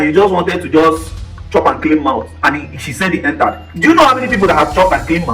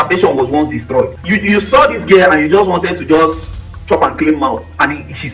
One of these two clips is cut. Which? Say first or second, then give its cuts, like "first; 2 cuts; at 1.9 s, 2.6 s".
second; 1 cut; at 1.2 s